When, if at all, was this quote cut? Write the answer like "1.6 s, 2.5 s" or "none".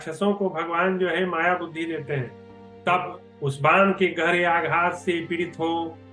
2.6 s